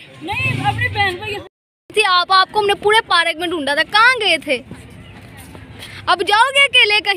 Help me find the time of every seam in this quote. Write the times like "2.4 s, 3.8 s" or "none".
1.3 s